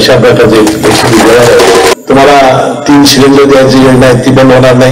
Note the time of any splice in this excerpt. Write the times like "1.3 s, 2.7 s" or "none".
1.9 s

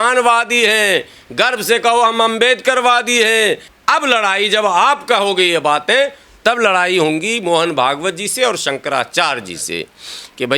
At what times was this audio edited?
3.7 s

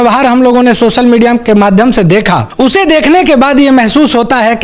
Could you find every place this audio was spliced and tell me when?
2.5 s

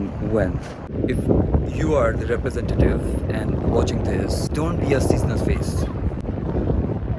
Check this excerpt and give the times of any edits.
1.0 s, 4.5 s

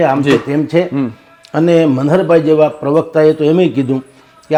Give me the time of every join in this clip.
none

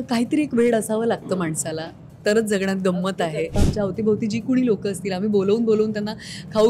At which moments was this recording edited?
3.6 s

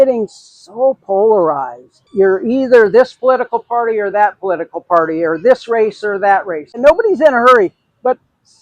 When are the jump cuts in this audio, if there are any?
2.0 s, 6.8 s

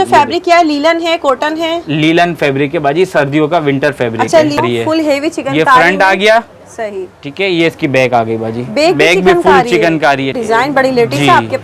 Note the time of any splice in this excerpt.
4.6 s, 10.4 s

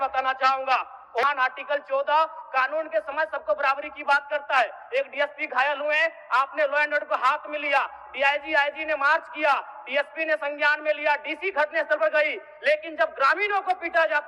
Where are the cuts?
1.2 s

